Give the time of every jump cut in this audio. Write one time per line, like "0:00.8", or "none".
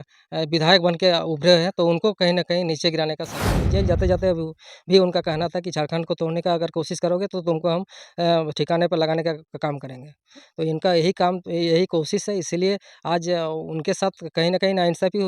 0:03.6